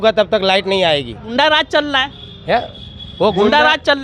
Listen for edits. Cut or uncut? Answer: cut